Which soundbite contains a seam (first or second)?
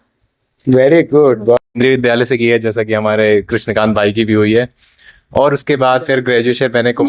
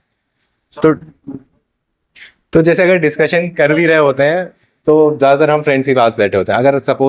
first